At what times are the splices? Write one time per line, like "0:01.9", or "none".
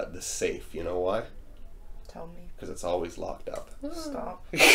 none